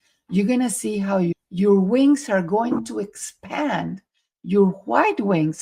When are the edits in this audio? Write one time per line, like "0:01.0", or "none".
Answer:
0:01.3